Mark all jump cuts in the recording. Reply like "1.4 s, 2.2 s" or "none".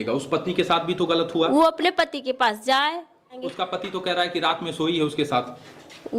3.4 s